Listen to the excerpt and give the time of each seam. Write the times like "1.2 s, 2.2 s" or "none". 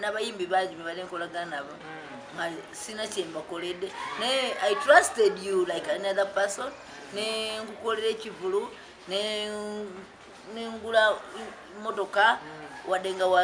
none